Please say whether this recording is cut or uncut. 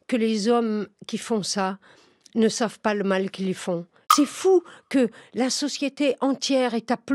cut